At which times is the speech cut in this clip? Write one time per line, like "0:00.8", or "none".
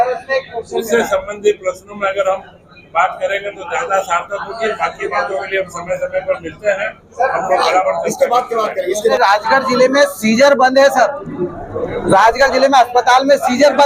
0:09.1